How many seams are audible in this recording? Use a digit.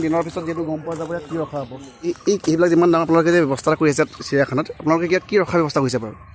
1